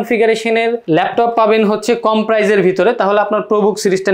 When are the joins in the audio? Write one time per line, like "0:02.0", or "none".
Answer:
none